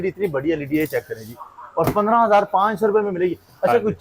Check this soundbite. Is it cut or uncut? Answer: uncut